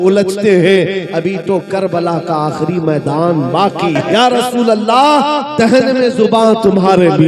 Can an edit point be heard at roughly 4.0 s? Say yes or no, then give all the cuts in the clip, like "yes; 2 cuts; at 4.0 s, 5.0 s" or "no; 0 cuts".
yes; 1 cut; at 4.0 s